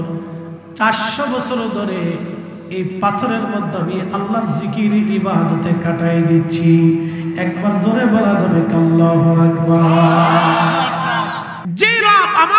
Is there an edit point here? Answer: yes; 1 cut; at 11.5 s

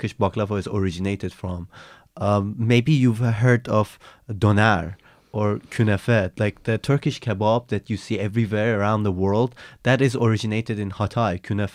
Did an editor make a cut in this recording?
no; 0 cuts

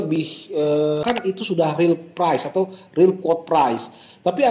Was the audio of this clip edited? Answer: yes; 1 cut; at 1.0 s

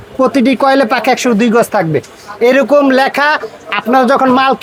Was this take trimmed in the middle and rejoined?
no; 0 cuts

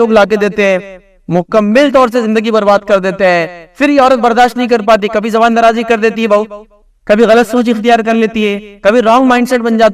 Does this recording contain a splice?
no; 0 cuts

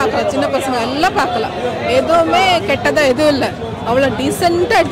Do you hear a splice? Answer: no; 0 cuts

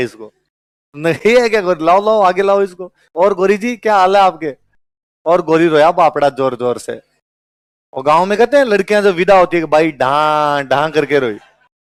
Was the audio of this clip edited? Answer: no; 0 cuts

